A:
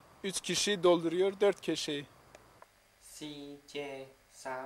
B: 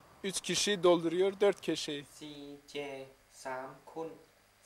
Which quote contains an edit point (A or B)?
B